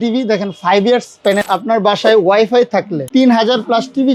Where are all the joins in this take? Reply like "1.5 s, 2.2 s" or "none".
1.4 s, 3.0 s